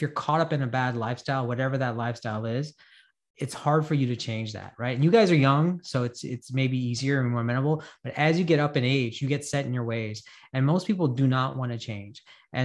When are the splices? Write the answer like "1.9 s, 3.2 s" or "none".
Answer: none

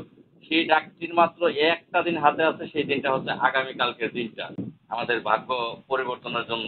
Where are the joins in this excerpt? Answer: 4.4 s

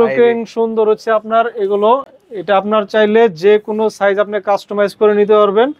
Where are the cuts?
none

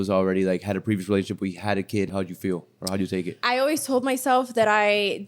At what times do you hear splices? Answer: 2.1 s, 3.3 s

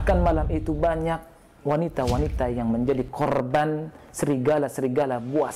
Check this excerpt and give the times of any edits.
none

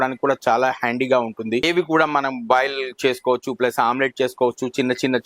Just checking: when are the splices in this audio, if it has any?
1.7 s

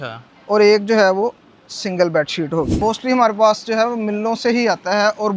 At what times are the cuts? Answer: 2.7 s

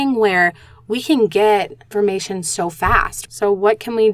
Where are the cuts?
1.9 s, 3.2 s

